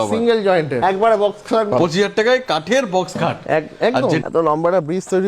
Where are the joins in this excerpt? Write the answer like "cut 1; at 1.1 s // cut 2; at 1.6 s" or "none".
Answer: cut 1; at 0.8 s // cut 2; at 1.7 s // cut 3; at 4.2 s